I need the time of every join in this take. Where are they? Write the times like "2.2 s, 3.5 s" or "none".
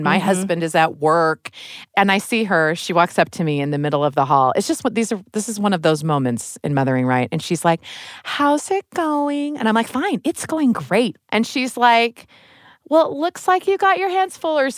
1.9 s, 11.2 s

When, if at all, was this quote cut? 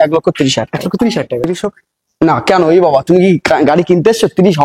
1.4 s

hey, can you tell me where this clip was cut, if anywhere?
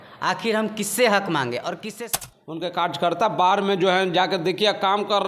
2.1 s

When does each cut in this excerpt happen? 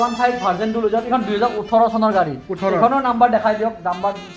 none

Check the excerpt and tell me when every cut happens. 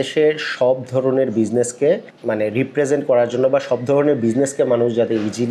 none

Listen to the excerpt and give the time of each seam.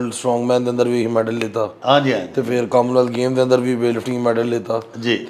none

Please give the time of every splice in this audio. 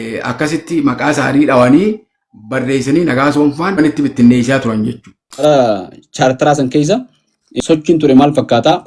3.8 s, 5.4 s, 7.6 s

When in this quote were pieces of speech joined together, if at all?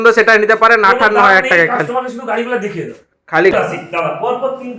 3.5 s

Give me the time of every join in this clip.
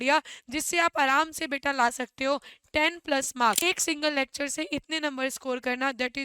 3.6 s

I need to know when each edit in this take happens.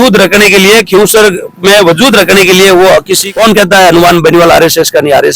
3.4 s

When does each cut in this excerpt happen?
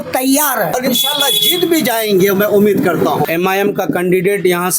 0.8 s, 3.3 s

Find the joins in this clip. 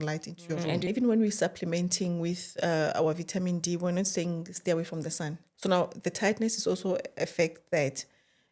0.9 s, 5.5 s

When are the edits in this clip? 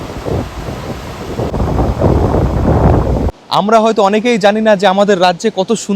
none

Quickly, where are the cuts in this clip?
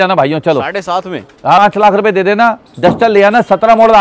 1.6 s

